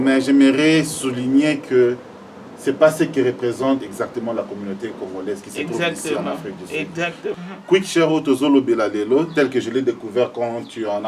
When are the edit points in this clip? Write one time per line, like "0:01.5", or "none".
0:07.3